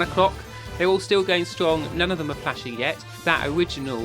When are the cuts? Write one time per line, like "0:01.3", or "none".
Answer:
0:03.1